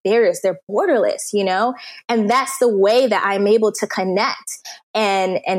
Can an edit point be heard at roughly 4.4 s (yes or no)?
no